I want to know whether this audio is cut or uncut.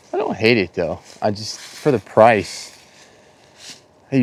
uncut